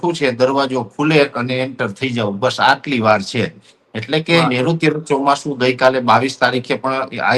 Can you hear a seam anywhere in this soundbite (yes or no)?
no